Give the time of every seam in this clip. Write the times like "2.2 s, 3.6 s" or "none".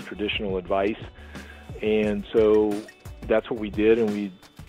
1.7 s

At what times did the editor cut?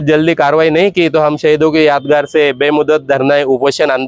none

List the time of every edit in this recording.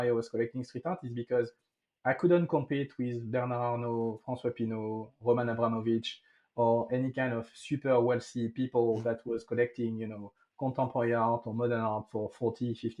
none

